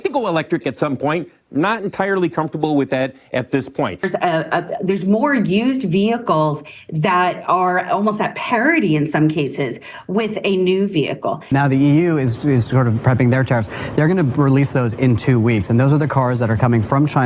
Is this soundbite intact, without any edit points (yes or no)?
no